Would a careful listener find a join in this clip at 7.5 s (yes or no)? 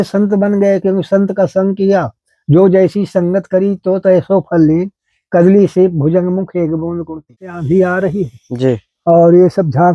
yes